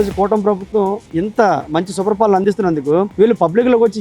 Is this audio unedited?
no; 1 cut; at 2.4 s

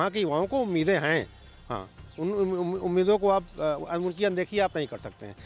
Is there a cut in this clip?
no; 0 cuts

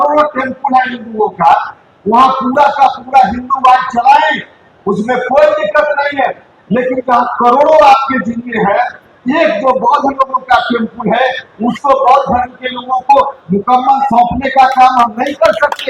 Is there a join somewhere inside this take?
no; 0 cuts

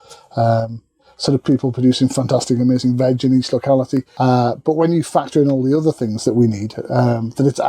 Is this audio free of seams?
no; 1 cut; at 4.1 s

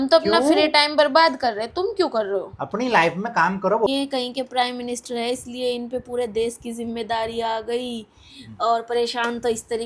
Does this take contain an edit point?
yes; 1 cut; at 3.9 s

